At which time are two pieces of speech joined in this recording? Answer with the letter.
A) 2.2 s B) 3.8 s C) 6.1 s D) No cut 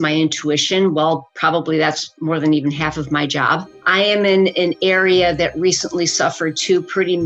B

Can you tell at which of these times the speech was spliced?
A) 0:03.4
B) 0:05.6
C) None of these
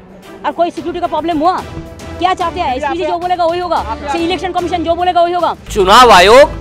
B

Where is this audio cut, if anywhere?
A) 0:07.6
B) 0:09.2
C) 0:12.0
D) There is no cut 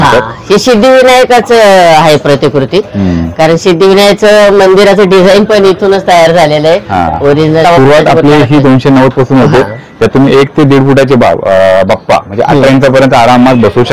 A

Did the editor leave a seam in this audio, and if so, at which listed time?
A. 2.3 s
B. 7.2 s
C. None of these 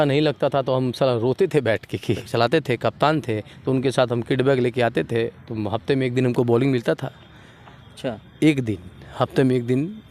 A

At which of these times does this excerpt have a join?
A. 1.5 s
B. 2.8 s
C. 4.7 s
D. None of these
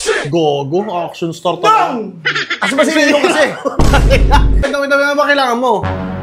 C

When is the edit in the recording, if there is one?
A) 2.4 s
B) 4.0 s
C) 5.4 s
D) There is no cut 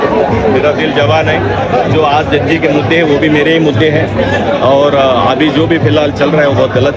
D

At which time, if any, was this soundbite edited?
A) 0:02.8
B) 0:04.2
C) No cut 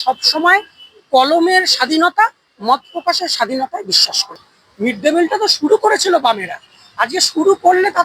B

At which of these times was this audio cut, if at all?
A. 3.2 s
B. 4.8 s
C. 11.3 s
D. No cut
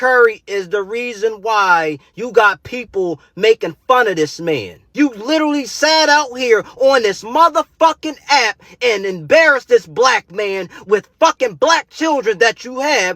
B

